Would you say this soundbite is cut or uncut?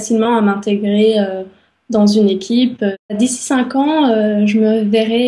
cut